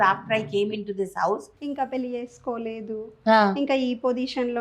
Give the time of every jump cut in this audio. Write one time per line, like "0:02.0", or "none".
0:01.6